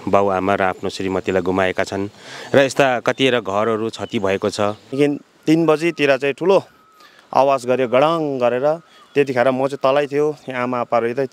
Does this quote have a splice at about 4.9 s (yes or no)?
yes